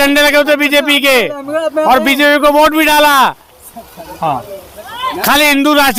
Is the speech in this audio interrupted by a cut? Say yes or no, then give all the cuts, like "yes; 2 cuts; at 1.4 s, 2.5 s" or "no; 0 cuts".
no; 0 cuts